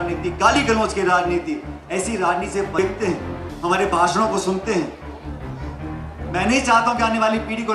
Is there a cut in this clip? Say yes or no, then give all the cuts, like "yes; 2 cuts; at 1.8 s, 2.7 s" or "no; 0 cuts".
yes; 1 cut; at 2.8 s